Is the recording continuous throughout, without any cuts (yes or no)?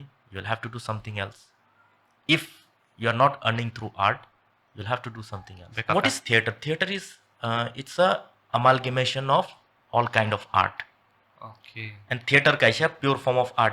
no